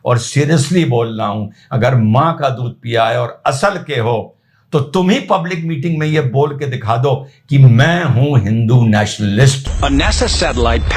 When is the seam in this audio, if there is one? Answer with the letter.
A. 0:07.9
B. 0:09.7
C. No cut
B